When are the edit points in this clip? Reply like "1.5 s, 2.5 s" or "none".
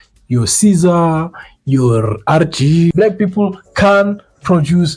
2.9 s